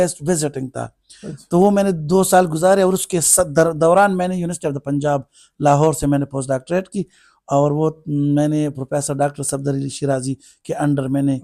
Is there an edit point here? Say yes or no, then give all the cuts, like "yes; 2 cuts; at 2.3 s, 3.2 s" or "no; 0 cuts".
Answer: no; 0 cuts